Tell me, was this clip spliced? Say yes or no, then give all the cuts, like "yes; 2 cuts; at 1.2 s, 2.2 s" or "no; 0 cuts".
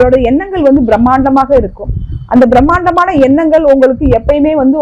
no; 0 cuts